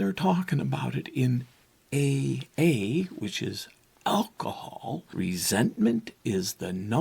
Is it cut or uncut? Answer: cut